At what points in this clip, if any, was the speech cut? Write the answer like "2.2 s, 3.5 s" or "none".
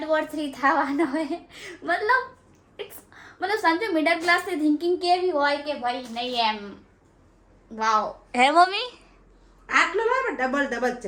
none